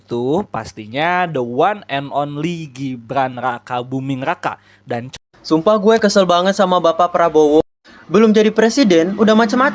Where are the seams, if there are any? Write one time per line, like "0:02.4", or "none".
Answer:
0:05.1